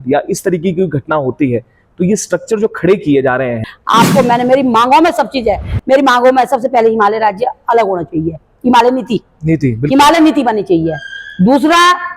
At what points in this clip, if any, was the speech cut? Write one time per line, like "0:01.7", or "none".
0:03.6